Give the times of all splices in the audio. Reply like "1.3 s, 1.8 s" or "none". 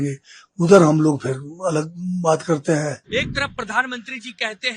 3.0 s